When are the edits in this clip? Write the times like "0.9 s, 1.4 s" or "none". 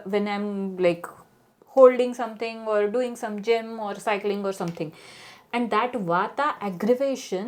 none